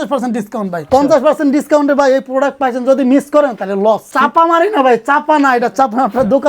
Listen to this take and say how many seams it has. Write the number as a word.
two